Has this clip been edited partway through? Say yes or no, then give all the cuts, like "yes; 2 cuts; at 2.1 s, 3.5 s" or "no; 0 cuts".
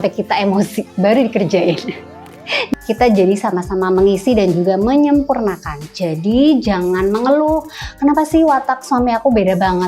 yes; 1 cut; at 2.6 s